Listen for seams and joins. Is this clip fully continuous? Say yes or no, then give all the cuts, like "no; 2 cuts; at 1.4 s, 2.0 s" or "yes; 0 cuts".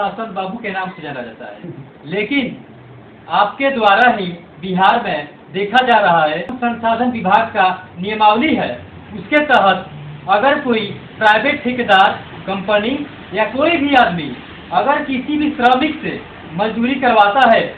no; 1 cut; at 6.5 s